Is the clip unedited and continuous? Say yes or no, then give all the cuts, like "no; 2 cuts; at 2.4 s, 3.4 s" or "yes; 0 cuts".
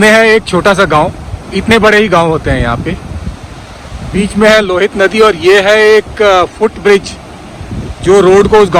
yes; 0 cuts